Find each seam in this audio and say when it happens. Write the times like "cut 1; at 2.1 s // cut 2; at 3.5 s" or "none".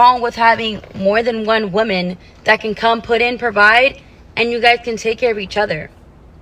cut 1; at 1.4 s